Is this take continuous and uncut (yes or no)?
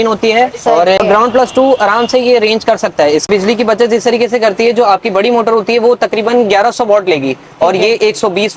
no